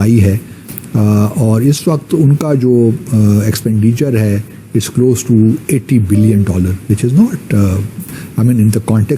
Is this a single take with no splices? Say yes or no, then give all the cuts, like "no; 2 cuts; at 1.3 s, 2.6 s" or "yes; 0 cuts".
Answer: yes; 0 cuts